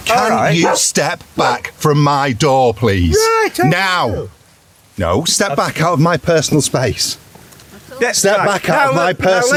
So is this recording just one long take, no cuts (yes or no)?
yes